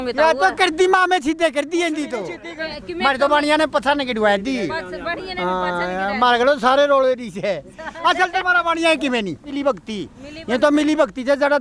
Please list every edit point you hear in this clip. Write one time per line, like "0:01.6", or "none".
0:02.7
0:09.5